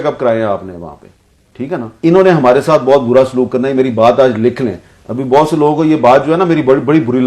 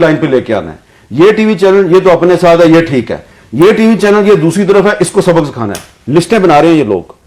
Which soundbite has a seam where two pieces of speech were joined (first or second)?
first